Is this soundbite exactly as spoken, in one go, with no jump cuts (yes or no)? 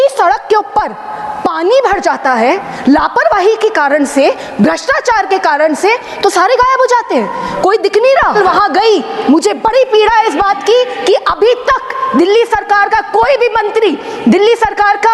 no